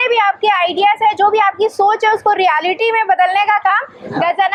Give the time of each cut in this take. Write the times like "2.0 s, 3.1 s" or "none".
none